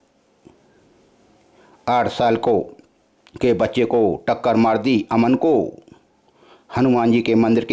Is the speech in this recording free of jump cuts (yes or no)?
yes